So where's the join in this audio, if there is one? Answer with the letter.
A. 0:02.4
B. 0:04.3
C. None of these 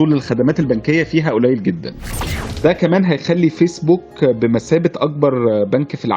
A